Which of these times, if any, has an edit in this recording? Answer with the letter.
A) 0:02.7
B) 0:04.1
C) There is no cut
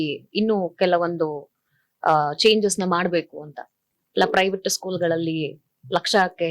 B